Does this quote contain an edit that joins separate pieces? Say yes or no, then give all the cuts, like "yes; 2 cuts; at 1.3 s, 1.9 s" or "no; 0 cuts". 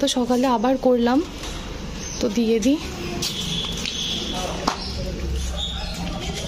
no; 0 cuts